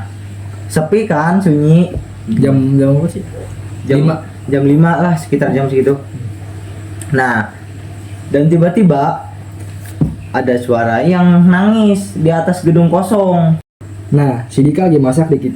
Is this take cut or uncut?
cut